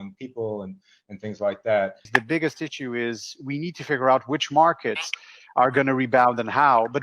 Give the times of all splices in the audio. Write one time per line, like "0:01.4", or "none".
0:02.1